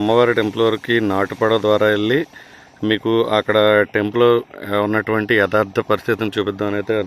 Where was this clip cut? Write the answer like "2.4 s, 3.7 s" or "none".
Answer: none